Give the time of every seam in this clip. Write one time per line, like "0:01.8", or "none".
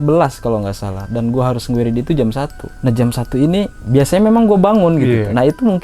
0:02.6
0:03.8